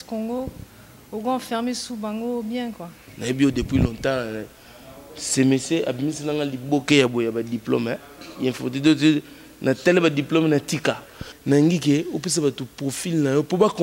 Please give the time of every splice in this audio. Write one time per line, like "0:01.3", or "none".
0:03.1
0:11.3